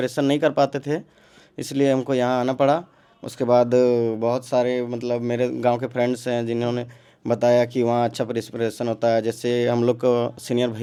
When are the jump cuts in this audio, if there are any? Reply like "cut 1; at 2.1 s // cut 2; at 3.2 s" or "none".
none

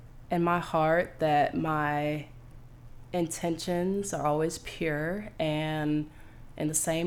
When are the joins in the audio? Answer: none

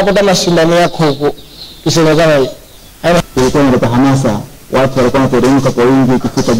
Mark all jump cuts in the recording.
cut 1; at 3.2 s

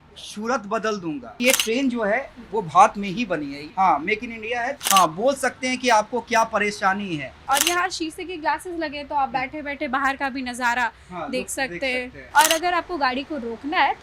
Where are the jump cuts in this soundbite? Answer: cut 1; at 1.3 s // cut 2; at 4.8 s // cut 3; at 7.4 s // cut 4; at 12.2 s

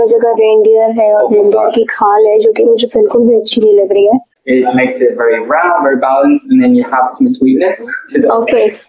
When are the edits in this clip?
cut 1; at 4.3 s

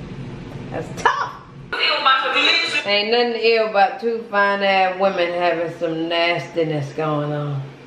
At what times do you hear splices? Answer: cut 1; at 1.7 s

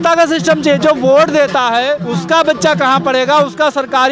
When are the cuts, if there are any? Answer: cut 1; at 2.1 s

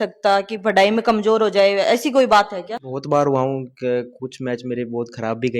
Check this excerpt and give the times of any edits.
cut 1; at 2.8 s

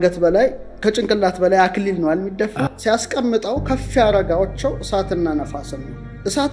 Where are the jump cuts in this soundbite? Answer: cut 1; at 2.7 s

